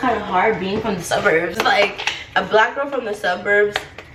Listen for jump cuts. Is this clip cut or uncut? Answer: uncut